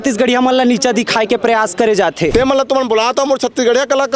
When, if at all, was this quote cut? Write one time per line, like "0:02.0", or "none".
0:02.3